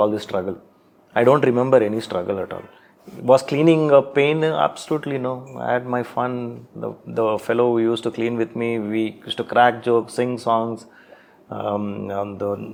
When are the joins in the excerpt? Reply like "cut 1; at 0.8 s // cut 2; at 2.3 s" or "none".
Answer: none